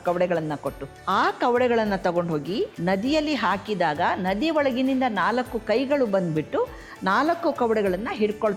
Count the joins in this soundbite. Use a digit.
2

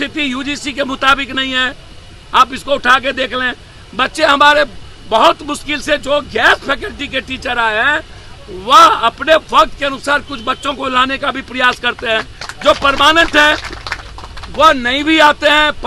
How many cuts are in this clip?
0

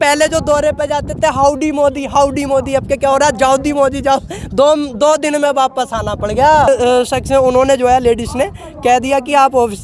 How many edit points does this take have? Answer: 1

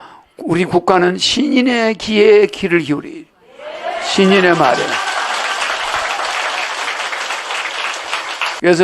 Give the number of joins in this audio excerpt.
0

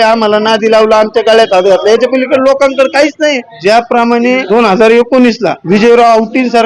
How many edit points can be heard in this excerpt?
3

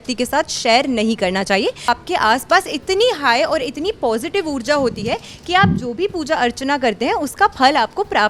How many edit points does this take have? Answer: 1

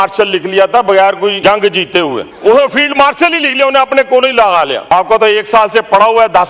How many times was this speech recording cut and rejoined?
3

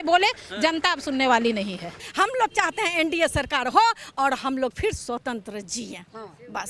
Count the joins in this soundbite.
1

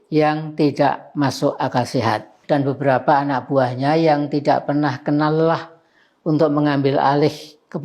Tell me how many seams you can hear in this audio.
1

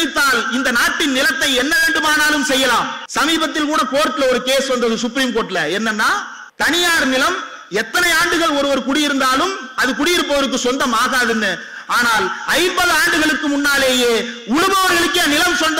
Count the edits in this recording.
2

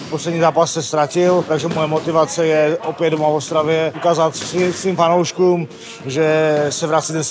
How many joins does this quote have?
2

